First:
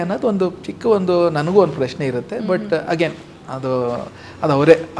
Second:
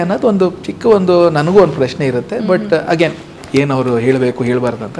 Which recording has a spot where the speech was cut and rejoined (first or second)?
second